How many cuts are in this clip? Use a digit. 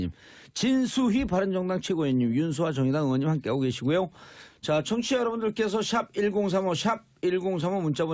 0